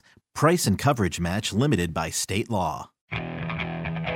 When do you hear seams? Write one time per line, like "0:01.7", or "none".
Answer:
0:02.9